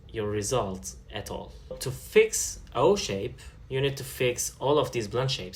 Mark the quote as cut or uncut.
cut